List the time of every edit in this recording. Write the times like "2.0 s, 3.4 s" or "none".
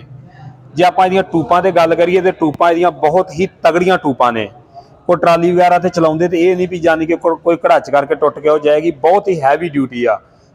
none